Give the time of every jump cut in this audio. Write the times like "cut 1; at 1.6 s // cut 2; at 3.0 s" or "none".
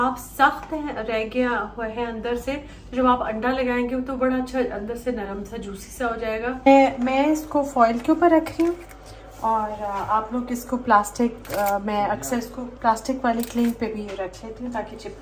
cut 1; at 6.7 s // cut 2; at 12.6 s